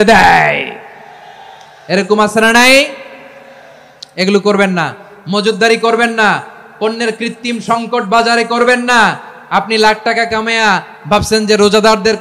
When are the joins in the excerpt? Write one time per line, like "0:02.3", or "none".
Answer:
none

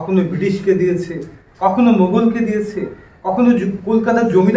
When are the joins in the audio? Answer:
none

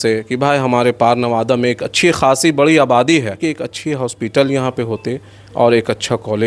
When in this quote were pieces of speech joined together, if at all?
0:03.4

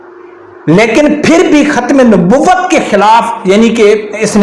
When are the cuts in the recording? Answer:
none

